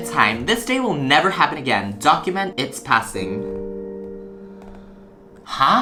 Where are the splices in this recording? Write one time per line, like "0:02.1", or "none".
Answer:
none